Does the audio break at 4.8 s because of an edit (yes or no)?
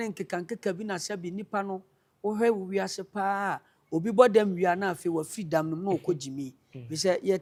no